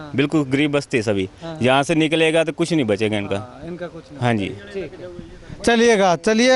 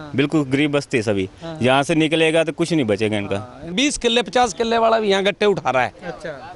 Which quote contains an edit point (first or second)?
second